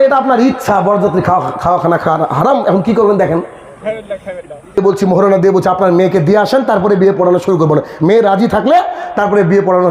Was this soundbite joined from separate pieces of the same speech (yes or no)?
yes